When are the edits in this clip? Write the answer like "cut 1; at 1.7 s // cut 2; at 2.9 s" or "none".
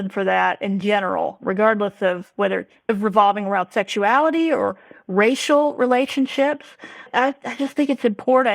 cut 1; at 1.4 s // cut 2; at 2.7 s